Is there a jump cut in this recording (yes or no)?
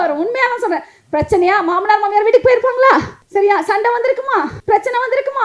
yes